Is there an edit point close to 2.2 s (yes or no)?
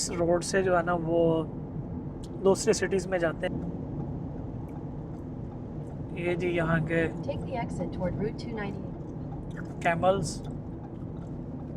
no